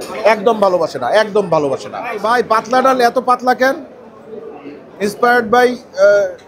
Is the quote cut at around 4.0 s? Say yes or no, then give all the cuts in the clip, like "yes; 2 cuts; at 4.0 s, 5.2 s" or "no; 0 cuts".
no; 1 cut; at 2.2 s